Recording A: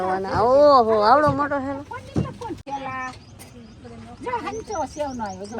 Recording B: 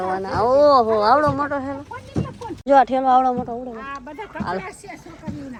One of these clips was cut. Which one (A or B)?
A